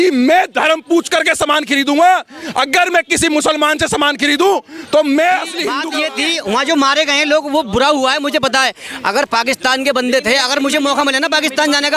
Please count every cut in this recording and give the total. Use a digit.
1